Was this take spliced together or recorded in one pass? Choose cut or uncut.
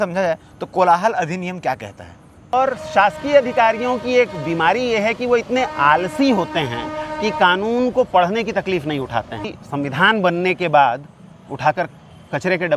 cut